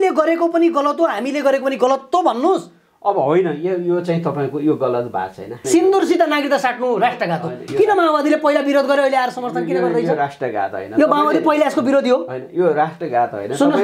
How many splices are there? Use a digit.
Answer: 1